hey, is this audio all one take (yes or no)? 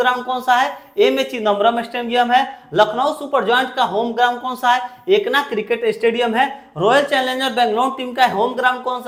yes